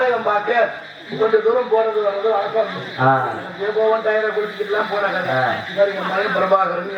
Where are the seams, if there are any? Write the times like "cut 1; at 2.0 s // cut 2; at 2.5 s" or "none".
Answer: none